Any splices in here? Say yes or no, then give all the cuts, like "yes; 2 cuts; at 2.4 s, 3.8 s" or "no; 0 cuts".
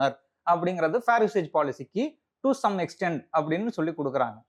no; 0 cuts